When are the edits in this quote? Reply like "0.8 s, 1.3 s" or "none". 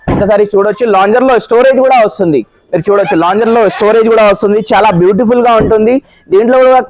none